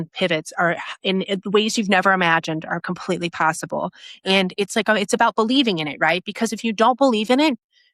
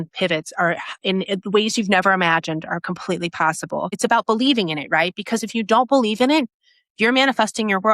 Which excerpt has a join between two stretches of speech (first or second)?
second